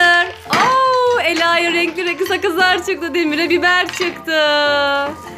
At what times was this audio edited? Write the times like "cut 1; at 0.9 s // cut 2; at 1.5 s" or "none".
none